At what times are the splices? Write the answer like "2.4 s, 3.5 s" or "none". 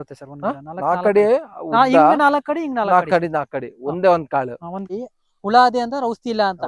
4.9 s